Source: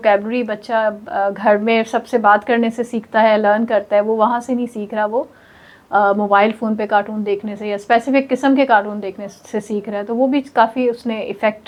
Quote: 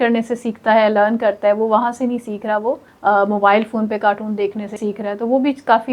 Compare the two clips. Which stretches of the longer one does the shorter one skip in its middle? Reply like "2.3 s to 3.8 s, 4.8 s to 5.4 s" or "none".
5.4 s to 5.8 s, 7.6 s to 9.6 s